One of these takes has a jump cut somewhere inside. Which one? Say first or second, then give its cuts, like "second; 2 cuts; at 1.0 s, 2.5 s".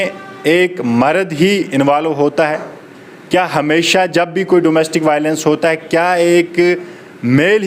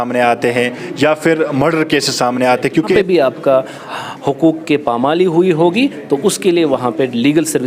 second; 1 cut; at 2.9 s